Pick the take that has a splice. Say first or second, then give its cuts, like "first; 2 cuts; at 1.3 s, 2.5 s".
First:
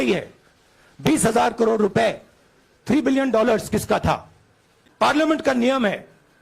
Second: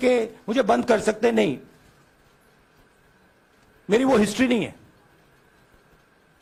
first; 1 cut; at 5.1 s